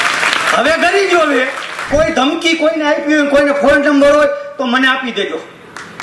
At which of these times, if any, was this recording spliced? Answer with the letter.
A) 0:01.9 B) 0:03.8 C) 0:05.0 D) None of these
A